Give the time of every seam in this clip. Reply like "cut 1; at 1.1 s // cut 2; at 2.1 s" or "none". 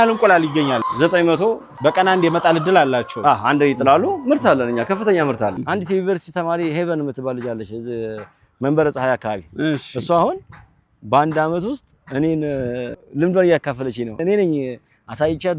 cut 1; at 0.8 s // cut 2; at 1.7 s // cut 3; at 5.5 s